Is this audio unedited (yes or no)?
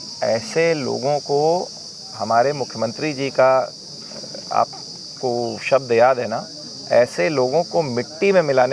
yes